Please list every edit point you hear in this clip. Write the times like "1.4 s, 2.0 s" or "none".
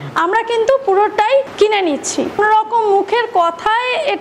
1.5 s, 2.4 s